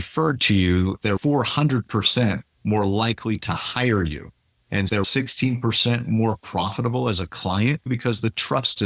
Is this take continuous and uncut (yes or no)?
no